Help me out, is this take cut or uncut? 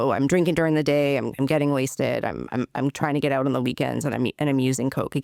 uncut